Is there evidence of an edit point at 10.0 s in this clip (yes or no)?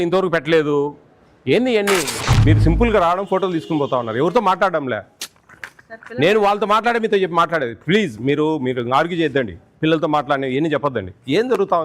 no